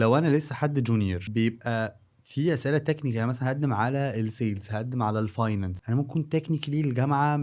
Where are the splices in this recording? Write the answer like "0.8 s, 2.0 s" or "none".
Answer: 1.2 s, 5.8 s